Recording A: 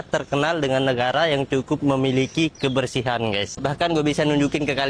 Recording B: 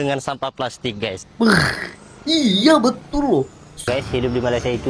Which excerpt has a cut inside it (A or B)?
B